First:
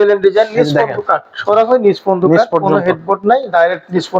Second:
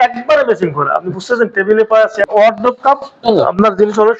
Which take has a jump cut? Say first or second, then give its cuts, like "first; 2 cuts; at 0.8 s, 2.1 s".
second; 2 cuts; at 2.3 s, 3.2 s